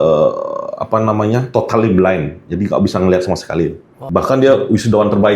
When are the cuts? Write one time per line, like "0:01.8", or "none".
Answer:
0:03.9